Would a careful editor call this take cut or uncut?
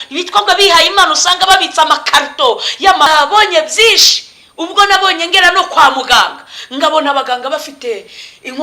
cut